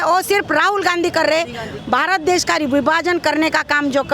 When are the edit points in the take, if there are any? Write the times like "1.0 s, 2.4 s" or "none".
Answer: 1.7 s